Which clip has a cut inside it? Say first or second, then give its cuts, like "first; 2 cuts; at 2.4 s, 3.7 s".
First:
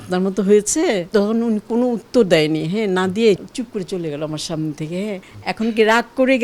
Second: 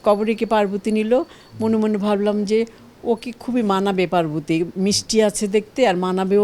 first; 3 cuts; at 1.0 s, 3.4 s, 5.3 s